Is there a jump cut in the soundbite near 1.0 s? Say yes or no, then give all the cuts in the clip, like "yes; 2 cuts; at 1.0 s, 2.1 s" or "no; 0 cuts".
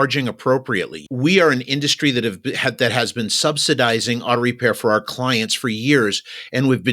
yes; 1 cut; at 1.0 s